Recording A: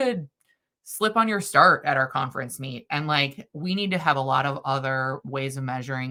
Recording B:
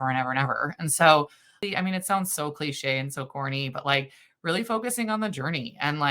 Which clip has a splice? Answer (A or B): B